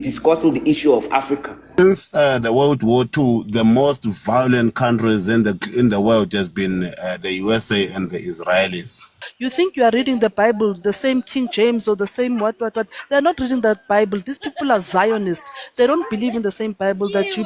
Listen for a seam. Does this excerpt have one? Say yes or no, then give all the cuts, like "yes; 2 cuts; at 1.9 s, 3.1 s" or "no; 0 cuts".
yes; 2 cuts; at 1.7 s, 9.3 s